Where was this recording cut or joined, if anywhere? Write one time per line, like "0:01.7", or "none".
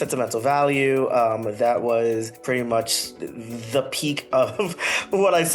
0:02.3